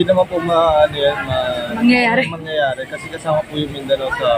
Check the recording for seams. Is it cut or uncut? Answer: uncut